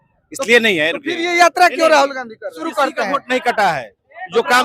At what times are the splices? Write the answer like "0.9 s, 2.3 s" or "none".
2.6 s